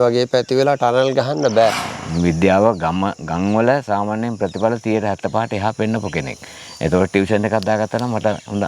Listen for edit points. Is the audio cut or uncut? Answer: cut